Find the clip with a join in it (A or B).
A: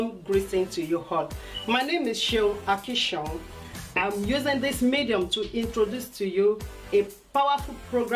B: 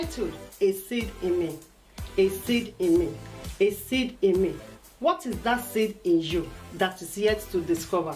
B